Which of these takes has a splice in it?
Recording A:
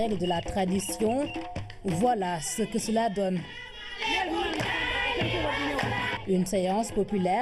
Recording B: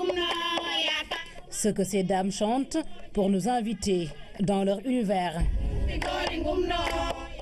B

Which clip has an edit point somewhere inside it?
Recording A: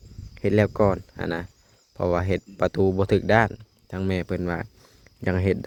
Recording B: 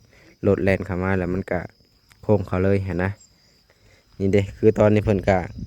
B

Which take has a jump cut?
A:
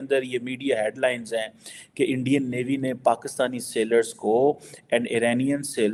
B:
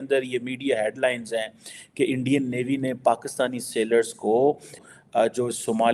B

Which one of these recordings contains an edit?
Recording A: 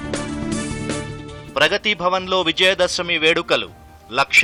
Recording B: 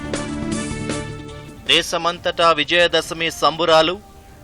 B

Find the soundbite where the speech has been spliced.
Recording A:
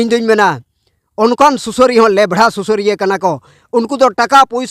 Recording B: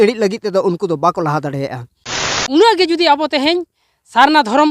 B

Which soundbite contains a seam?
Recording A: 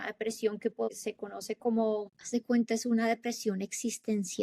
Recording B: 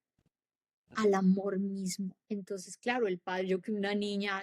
B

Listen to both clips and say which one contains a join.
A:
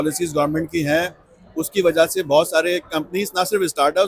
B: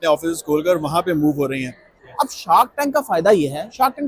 B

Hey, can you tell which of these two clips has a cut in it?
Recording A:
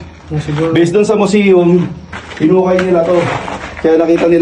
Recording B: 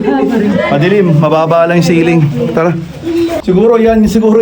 B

